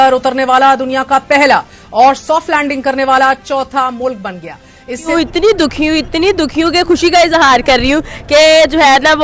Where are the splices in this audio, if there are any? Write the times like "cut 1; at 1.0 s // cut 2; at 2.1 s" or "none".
cut 1; at 5.1 s